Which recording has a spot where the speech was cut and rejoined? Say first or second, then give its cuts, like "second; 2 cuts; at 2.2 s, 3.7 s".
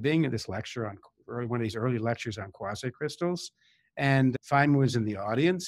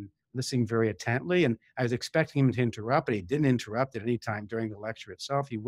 first; 1 cut; at 4.3 s